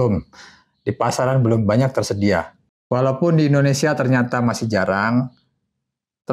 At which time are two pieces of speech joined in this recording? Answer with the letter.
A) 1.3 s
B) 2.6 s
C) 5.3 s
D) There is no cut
B